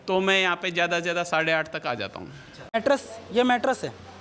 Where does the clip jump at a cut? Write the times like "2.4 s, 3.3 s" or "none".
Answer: 2.7 s